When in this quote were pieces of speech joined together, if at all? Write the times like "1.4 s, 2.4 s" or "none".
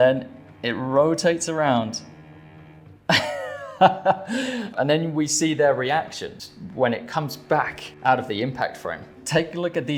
4.7 s, 6.3 s